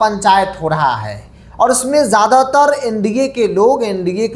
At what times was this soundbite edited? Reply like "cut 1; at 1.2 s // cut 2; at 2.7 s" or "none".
none